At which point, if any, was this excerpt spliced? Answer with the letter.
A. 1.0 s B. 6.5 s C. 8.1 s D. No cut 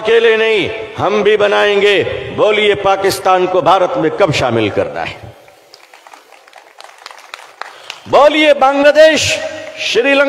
D